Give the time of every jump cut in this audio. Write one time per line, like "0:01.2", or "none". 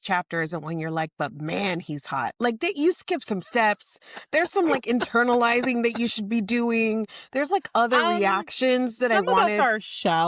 none